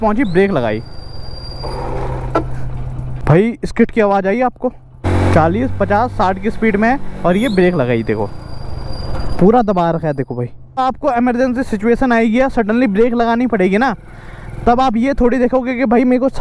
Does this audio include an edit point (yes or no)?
yes